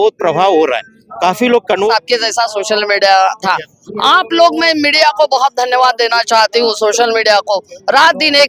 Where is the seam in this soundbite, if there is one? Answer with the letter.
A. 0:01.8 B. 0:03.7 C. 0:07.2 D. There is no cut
A